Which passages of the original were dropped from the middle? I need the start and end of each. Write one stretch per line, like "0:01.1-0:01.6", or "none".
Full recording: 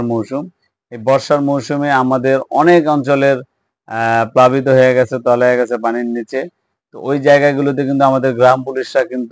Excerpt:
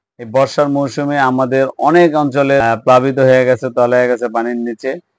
0:03.3-0:04.1